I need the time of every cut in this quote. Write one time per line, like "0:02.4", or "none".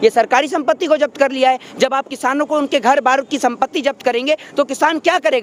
none